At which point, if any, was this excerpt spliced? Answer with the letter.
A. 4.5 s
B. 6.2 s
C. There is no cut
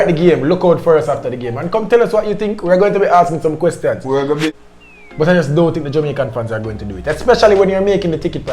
A